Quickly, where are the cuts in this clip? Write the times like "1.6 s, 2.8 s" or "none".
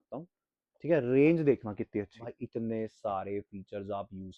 2.3 s

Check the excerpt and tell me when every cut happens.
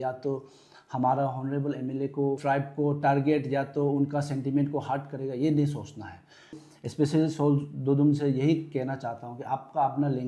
2.4 s, 6.6 s

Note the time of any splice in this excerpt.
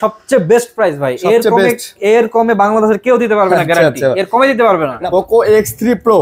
5.0 s

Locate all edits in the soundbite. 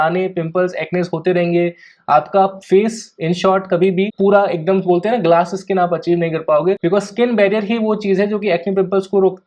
4.1 s

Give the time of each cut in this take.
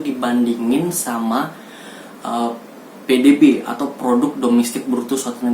none

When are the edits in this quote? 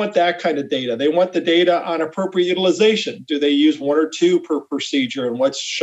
none

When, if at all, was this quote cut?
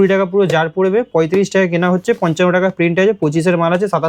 none

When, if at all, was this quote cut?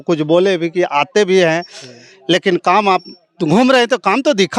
none

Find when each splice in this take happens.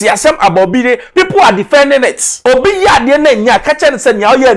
2.3 s

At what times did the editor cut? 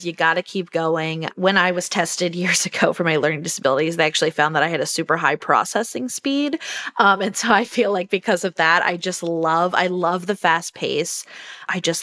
none

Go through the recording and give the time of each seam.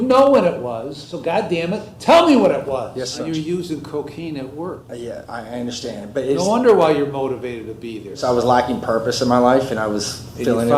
1.3 s, 3.2 s, 4.9 s, 8.0 s

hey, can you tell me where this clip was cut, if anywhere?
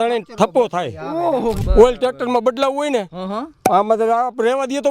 1.6 s

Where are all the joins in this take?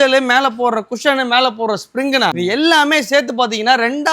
2.4 s

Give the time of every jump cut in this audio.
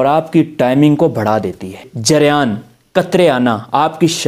1.8 s

